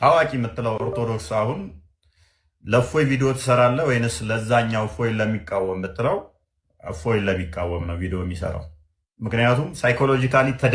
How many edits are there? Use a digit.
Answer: 0